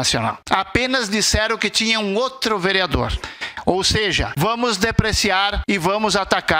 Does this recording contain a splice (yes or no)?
yes